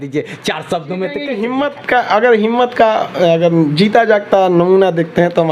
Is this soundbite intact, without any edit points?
no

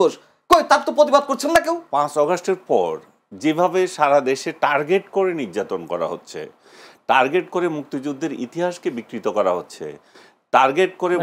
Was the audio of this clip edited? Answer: yes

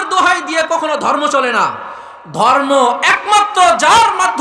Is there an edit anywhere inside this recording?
no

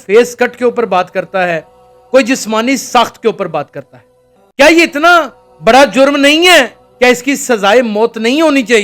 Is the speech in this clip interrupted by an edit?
no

